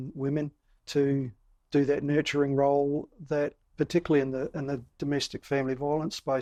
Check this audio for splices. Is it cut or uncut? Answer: uncut